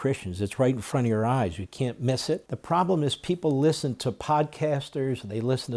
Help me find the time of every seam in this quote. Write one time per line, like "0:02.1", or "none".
0:02.5